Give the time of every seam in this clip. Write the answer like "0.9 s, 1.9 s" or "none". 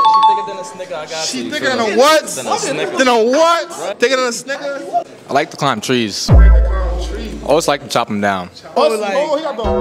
3.9 s, 5.2 s, 8.8 s

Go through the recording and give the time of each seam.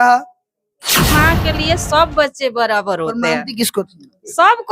1.1 s

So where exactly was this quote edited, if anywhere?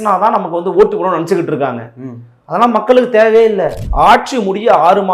3.8 s

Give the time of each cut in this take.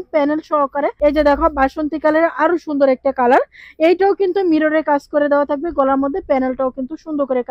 0.9 s

